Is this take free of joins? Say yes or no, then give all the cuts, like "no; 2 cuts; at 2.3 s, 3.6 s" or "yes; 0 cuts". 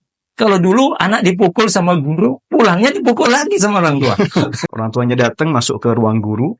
no; 1 cut; at 4.6 s